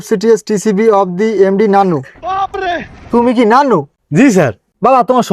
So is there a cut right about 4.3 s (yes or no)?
yes